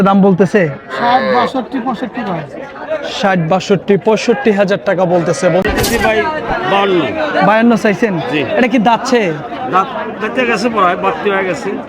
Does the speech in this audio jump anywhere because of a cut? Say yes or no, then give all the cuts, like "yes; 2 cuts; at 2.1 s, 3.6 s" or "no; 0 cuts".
yes; 1 cut; at 5.6 s